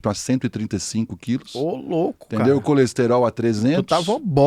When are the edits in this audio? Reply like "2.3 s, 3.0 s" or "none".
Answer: none